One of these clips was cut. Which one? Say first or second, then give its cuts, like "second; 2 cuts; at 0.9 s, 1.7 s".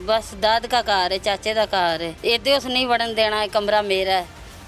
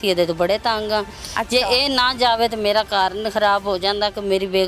first; 1 cut; at 2.1 s